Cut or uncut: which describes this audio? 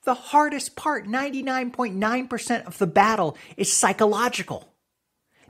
uncut